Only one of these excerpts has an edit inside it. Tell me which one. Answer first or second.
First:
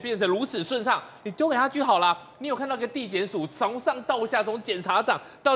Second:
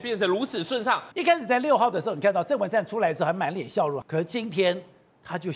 second